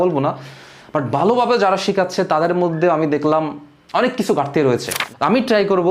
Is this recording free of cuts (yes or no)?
no